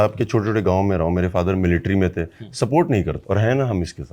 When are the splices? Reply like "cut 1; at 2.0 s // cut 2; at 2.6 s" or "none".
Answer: cut 1; at 3.2 s